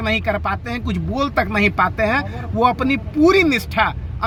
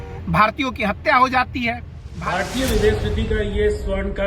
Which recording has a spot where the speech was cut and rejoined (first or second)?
second